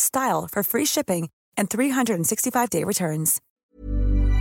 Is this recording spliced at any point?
yes; 1 cut; at 3.4 s

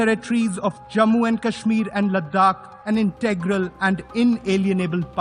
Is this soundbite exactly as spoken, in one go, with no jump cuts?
no; 1 cut; at 2.7 s

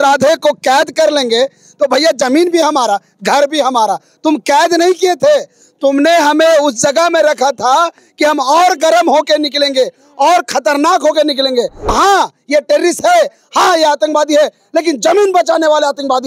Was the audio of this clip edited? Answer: yes; 1 cut; at 11.9 s

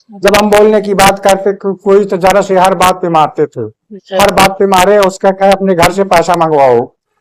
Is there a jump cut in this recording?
no; 0 cuts

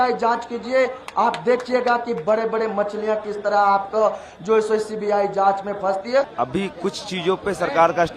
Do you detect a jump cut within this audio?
yes; 1 cut; at 6.3 s

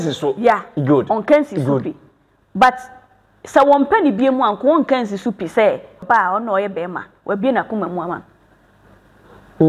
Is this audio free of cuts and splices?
no; 1 cut; at 6.0 s

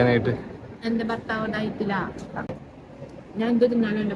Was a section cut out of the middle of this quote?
yes; 1 cut; at 2.5 s

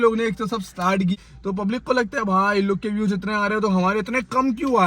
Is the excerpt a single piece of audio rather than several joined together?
no; 1 cut; at 1.2 s

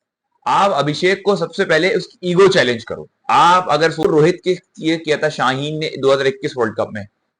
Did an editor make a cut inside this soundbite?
yes; 1 cut; at 4.0 s

